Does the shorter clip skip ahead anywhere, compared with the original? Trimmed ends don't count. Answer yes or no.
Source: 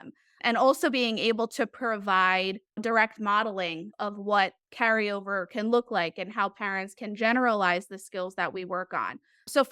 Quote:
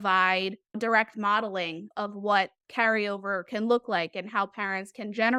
no